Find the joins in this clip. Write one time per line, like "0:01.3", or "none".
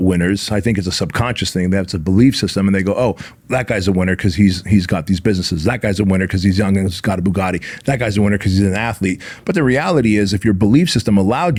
none